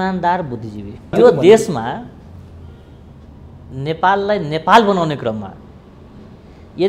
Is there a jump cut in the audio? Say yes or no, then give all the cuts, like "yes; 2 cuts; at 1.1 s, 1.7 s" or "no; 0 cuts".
yes; 1 cut; at 1.2 s